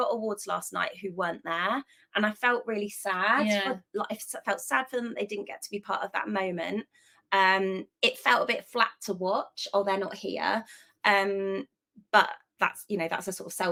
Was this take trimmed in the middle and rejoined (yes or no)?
no